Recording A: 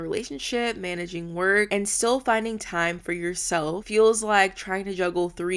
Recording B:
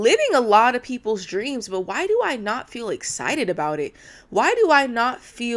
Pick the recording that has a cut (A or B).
A